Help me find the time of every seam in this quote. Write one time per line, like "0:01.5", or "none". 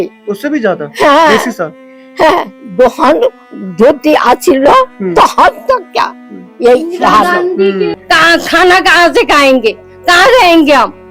0:08.0